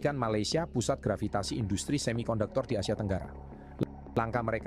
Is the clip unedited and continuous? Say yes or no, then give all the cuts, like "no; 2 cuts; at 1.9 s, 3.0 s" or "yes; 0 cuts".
yes; 0 cuts